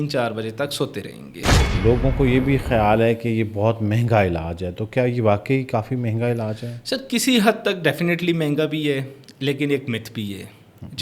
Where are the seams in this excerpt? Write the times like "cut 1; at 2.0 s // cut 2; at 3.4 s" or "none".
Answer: cut 1; at 1.7 s